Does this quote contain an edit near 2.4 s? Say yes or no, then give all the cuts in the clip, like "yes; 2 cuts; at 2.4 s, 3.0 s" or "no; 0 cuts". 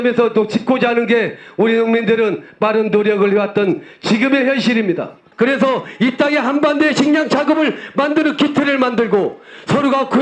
no; 1 cut; at 5.2 s